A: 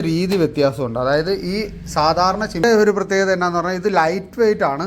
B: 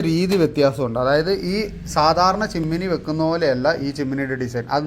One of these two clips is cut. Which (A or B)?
A